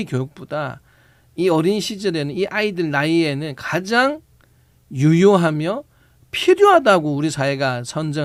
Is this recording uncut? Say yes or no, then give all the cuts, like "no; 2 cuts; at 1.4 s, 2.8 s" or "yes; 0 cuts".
yes; 0 cuts